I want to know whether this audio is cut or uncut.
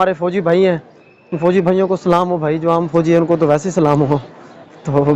uncut